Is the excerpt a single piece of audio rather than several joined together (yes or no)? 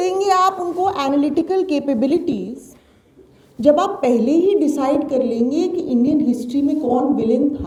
yes